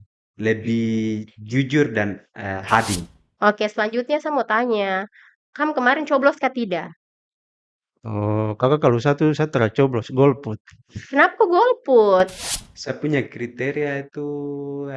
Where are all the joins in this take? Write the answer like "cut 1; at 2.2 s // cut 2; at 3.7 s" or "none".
cut 1; at 3.1 s // cut 2; at 12.4 s